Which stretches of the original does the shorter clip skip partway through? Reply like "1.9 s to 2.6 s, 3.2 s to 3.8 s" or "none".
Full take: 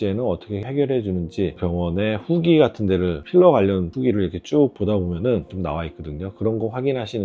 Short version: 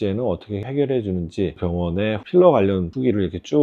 2.2 s to 3.2 s